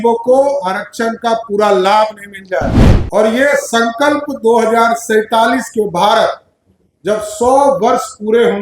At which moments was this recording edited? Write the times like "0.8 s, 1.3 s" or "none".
2.8 s